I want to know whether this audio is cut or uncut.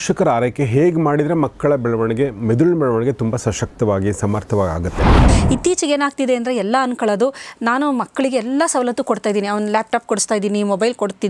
cut